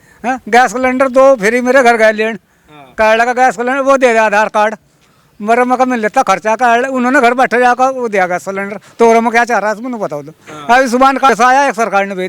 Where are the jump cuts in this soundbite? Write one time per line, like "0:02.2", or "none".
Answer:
0:11.3